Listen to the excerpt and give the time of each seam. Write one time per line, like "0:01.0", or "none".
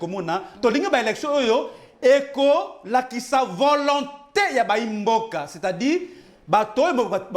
none